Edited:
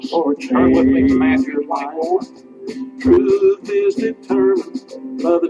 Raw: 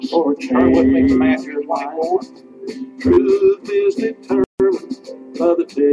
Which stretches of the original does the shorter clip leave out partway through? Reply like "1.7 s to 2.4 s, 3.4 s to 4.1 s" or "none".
4.4 s to 4.6 s